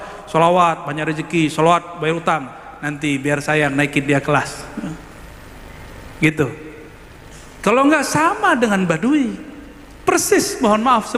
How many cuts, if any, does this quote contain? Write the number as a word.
zero